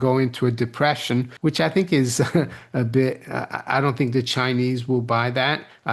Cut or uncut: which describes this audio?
cut